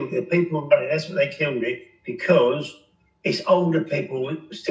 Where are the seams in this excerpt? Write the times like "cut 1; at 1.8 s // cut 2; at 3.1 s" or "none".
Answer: none